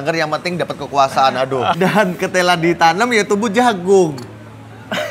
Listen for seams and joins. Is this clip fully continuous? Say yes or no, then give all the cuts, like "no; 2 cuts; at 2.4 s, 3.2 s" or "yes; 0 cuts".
no; 1 cut; at 1.8 s